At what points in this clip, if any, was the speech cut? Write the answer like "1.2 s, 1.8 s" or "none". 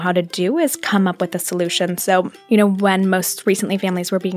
2.4 s